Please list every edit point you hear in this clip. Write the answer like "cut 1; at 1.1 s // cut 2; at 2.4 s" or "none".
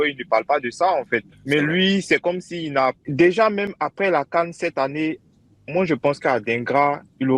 cut 1; at 1.3 s // cut 2; at 3.0 s